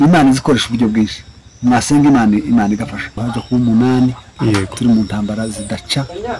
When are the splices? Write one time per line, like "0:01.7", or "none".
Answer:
0:03.3